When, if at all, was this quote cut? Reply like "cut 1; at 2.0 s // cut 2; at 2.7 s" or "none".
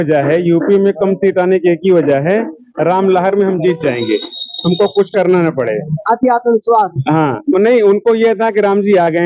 none